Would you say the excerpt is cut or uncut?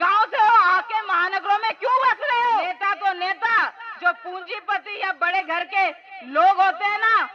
cut